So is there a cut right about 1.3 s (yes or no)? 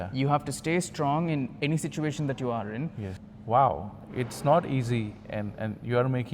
no